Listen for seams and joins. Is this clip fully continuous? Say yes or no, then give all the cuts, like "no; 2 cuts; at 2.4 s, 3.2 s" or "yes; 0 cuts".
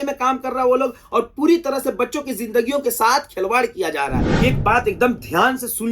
no; 1 cut; at 4.2 s